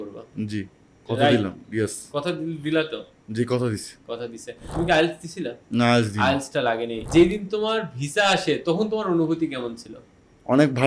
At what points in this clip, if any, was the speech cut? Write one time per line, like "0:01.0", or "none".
0:04.7
0:07.0